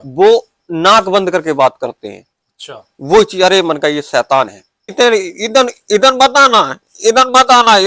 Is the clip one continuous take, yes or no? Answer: no